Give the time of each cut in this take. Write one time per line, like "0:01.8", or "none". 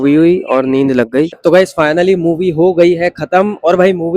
0:01.3